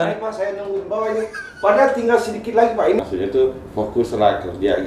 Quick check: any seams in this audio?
yes; 1 cut; at 3.0 s

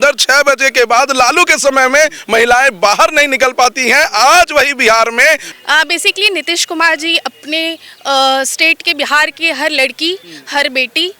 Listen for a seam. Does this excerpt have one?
yes; 1 cut; at 5.5 s

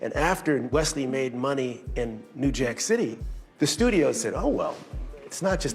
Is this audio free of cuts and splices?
yes; 0 cuts

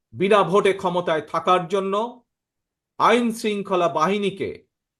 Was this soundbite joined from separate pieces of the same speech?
no; 0 cuts

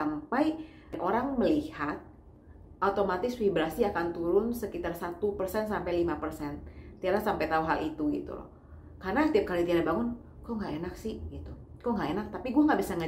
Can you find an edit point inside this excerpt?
no; 0 cuts

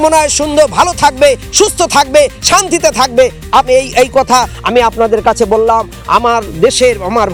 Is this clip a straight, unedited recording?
yes; 0 cuts

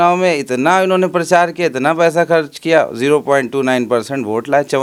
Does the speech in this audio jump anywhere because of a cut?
no; 0 cuts

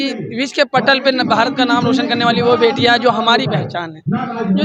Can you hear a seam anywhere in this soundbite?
no; 0 cuts

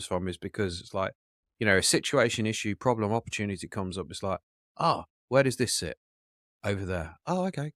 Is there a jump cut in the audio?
no; 0 cuts

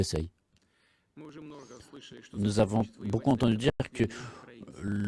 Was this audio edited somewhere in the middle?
no; 0 cuts

